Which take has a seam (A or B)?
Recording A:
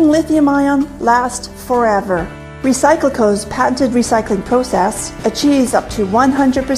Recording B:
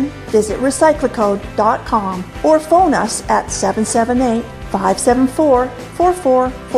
A